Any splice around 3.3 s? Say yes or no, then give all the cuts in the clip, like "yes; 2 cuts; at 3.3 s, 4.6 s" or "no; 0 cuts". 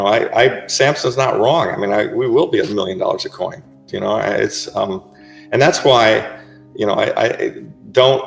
no; 0 cuts